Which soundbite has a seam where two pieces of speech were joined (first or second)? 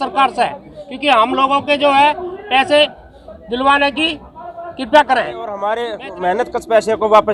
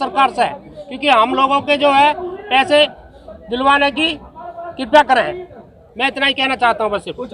first